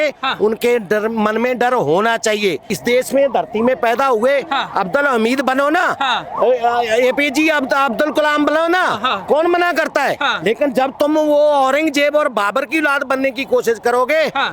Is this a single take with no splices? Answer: no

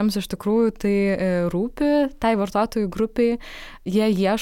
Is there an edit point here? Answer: no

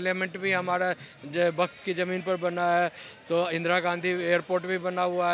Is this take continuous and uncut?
yes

